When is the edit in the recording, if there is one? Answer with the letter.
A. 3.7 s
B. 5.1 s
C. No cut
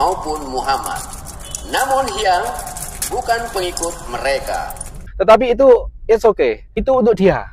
C